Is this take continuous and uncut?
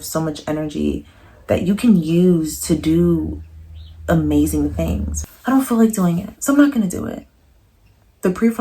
no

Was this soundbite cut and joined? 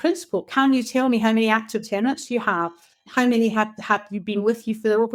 no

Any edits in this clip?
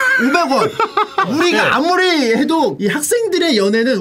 yes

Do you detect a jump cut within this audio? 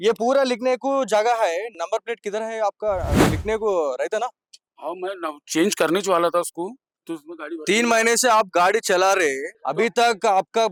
no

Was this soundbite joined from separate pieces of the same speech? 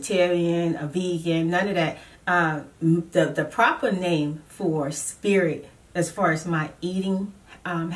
no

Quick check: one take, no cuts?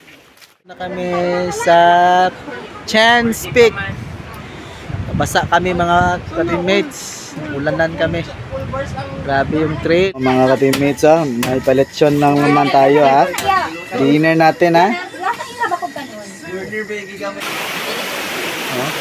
no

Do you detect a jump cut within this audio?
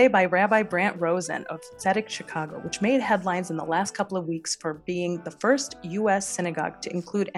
no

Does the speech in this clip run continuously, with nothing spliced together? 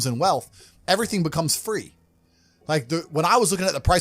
yes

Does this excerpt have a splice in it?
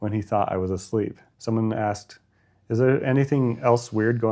yes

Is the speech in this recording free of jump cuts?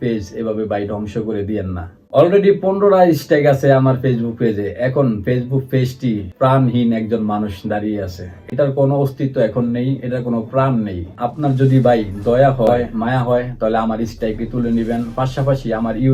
yes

